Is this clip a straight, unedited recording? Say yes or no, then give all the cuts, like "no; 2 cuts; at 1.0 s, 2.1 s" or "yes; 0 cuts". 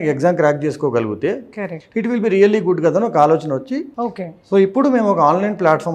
yes; 0 cuts